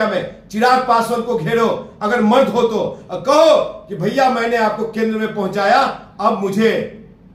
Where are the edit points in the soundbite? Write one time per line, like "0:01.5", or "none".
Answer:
none